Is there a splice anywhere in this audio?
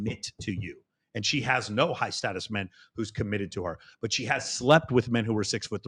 no; 0 cuts

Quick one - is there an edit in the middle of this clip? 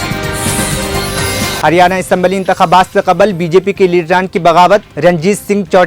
no; 0 cuts

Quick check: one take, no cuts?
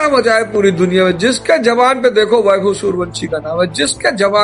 yes; 0 cuts

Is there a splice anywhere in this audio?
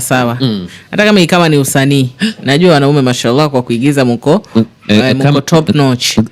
no; 0 cuts

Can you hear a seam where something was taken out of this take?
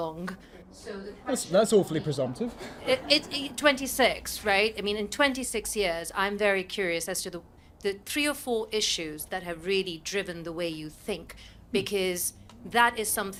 no; 0 cuts

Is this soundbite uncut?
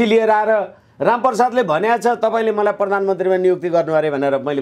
yes; 0 cuts

